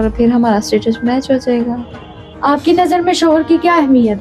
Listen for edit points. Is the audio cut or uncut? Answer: uncut